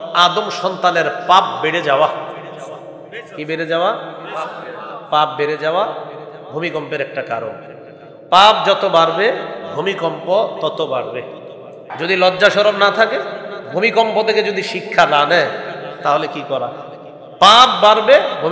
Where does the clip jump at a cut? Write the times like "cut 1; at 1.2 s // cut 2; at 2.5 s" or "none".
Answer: cut 1; at 12.0 s